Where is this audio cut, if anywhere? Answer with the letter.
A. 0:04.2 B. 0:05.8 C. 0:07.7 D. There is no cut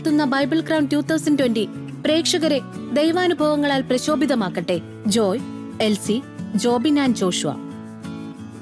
C